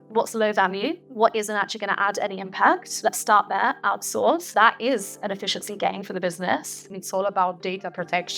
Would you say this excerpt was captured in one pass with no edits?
no; 4 cuts; at 1.0 s, 2.9 s, 4.4 s, 7.0 s

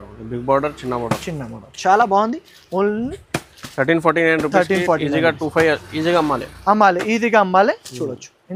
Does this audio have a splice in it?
no; 0 cuts

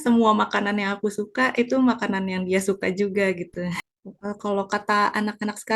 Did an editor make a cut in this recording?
yes; 1 cut; at 3.8 s

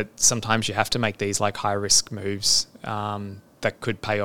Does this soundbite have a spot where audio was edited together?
no; 0 cuts

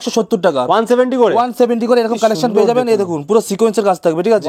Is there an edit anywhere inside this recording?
no; 0 cuts

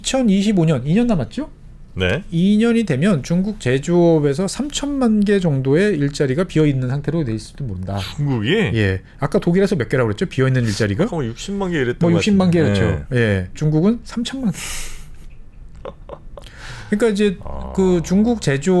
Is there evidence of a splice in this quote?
no; 0 cuts

